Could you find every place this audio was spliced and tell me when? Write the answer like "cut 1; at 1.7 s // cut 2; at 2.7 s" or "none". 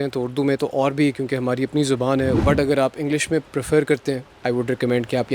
cut 1; at 2.4 s // cut 2; at 3.5 s // cut 3; at 4.3 s